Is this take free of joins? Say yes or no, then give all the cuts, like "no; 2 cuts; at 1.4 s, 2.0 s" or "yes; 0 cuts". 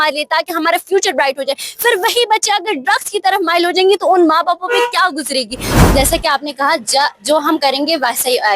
no; 1 cut; at 5.6 s